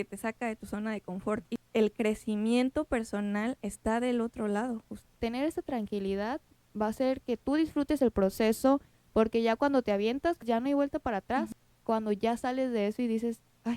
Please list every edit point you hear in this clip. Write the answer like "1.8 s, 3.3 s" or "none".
1.5 s, 5.0 s, 9.0 s, 10.4 s, 11.5 s